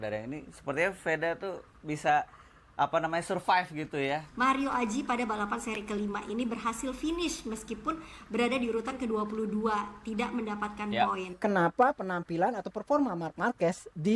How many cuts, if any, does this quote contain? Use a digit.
2